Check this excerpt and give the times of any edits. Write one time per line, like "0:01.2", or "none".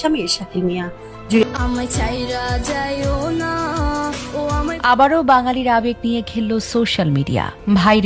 0:01.4